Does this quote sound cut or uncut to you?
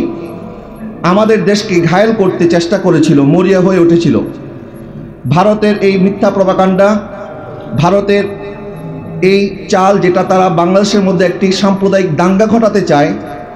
uncut